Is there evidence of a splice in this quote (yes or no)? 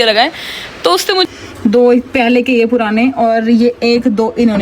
yes